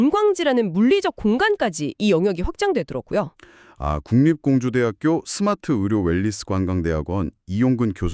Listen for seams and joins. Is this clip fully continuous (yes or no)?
yes